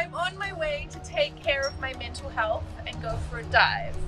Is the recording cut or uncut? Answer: cut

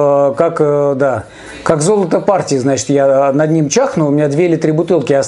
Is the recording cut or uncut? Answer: uncut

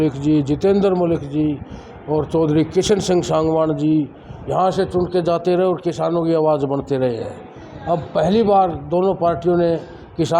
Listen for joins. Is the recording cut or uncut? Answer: uncut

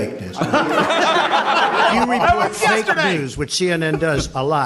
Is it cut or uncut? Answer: cut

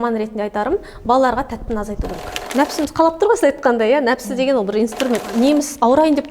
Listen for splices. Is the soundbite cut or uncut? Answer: cut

